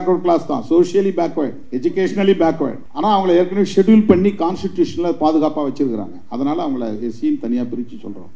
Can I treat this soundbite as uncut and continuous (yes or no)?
no